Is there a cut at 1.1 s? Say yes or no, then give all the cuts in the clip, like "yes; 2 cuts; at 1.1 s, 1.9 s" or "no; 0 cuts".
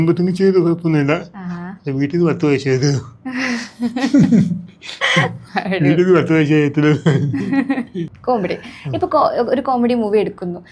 no; 1 cut; at 8.0 s